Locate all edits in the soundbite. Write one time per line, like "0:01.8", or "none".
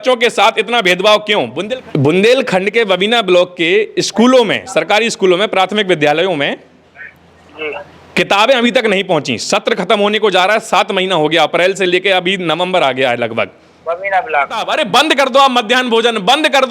0:01.6
0:14.6